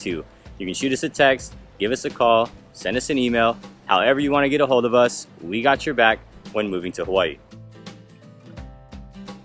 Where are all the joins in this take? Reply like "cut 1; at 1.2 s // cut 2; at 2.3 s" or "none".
none